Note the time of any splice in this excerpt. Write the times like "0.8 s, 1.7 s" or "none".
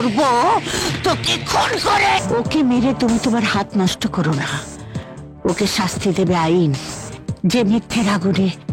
2.2 s